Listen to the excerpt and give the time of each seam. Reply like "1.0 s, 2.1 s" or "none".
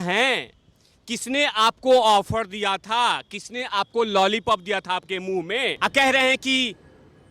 5.8 s